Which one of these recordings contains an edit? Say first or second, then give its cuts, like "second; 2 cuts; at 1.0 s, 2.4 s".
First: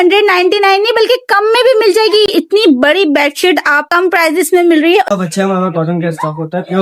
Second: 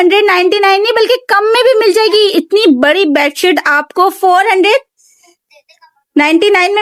first; 2 cuts; at 3.9 s, 5.1 s